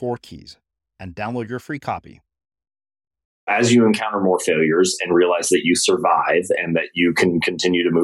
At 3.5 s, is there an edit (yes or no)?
yes